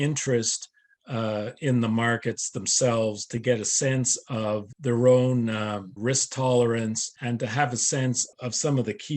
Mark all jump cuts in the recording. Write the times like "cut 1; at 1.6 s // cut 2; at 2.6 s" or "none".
cut 1; at 4.7 s // cut 2; at 5.9 s // cut 3; at 7.1 s // cut 4; at 8.3 s